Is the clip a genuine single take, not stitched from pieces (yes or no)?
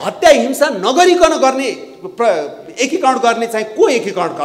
yes